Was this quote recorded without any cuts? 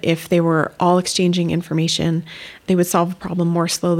no; 1 cut; at 2.7 s

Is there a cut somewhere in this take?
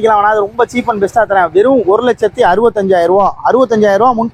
no; 0 cuts

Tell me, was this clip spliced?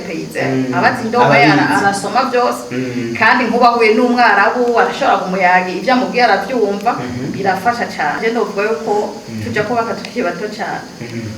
yes; 1 cut; at 8.2 s

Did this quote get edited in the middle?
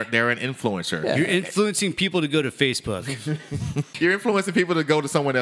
yes; 1 cut; at 3.9 s

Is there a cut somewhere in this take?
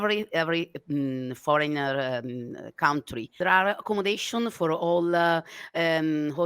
yes; 1 cut; at 3.4 s

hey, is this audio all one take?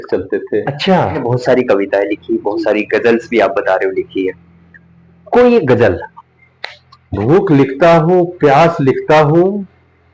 no; 2 cuts; at 1.1 s, 6.1 s

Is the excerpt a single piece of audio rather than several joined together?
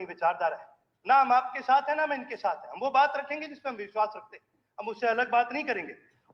yes; 0 cuts

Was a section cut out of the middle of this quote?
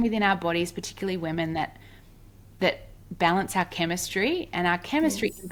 no; 0 cuts

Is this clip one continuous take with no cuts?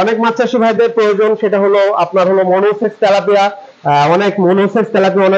yes; 0 cuts

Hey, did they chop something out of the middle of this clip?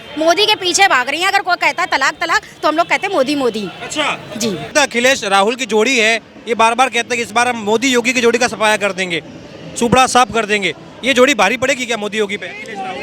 yes; 1 cut; at 4.7 s

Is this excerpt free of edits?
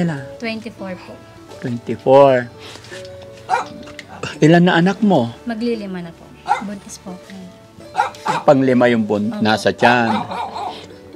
yes; 0 cuts

